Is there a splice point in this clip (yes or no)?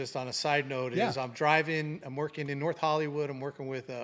no